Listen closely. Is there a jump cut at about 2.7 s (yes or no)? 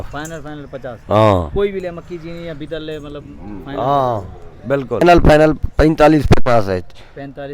no